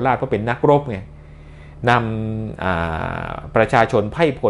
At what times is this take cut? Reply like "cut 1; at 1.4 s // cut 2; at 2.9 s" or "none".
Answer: none